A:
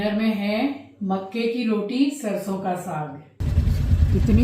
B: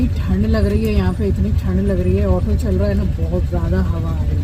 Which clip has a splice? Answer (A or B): A